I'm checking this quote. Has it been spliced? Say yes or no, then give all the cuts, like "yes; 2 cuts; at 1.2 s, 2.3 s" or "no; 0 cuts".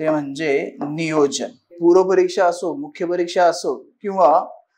yes; 1 cut; at 1.7 s